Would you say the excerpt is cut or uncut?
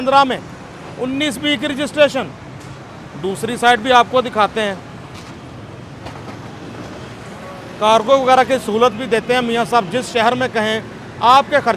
uncut